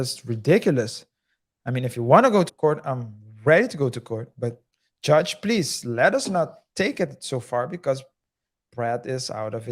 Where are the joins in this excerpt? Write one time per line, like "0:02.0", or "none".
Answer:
0:02.5

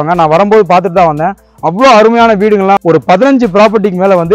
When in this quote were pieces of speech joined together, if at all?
0:02.8

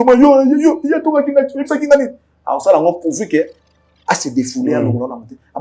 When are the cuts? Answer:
none

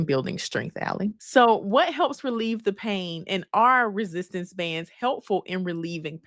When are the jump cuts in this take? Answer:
0:01.2

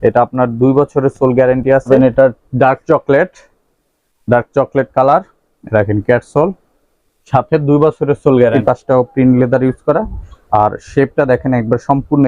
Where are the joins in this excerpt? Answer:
0:01.9
0:08.6

